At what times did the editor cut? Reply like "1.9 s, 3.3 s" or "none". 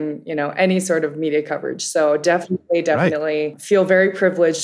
3.6 s